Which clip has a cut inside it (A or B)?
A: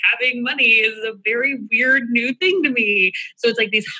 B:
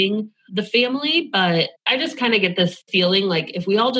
B